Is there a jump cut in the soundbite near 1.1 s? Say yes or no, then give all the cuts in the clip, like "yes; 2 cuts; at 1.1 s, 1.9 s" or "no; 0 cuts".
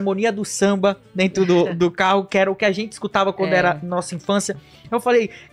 no; 0 cuts